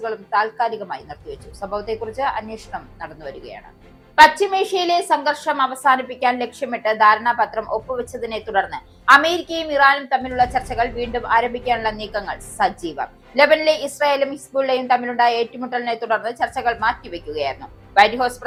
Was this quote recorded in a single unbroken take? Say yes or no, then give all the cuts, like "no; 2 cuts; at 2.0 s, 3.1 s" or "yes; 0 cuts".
yes; 0 cuts